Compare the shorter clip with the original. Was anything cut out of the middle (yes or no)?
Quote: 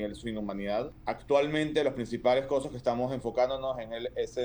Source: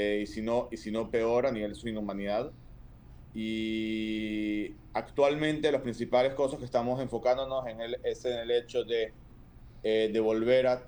yes